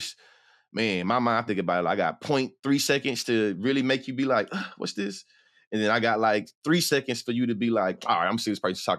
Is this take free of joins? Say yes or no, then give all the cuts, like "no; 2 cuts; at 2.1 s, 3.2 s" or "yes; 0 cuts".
yes; 0 cuts